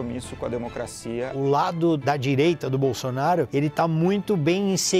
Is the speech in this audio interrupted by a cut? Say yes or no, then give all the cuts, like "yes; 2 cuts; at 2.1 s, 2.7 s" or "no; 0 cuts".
yes; 3 cuts; at 1.3 s, 2.0 s, 3.5 s